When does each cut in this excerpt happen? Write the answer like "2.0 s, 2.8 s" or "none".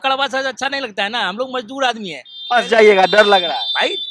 none